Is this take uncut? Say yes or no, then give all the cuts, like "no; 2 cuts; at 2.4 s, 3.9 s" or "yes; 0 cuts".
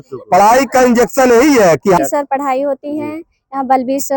no; 1 cut; at 2.0 s